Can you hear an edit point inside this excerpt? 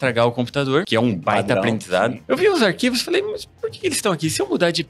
yes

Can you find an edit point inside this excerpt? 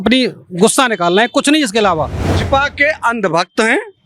yes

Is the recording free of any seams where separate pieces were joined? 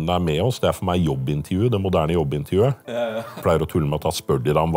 no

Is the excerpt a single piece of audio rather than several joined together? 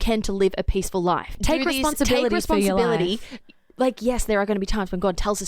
no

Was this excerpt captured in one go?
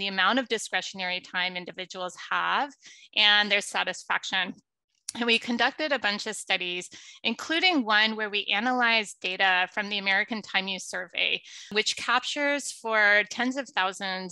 yes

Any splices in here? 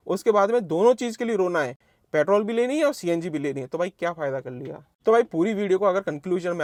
no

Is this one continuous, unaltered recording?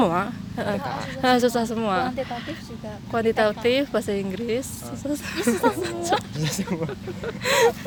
yes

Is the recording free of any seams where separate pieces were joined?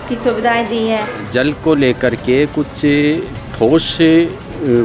no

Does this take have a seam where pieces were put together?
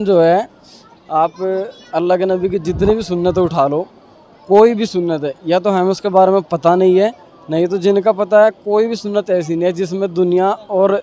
no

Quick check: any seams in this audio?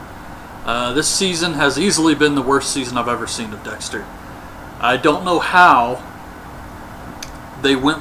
yes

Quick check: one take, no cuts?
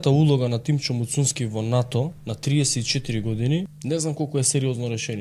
no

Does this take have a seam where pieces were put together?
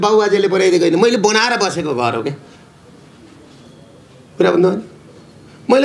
no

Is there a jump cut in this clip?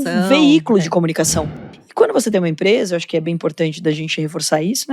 yes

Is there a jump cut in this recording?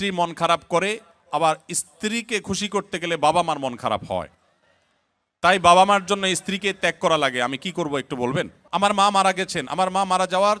yes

